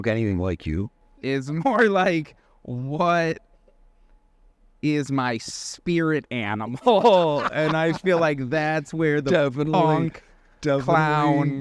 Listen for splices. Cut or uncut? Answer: cut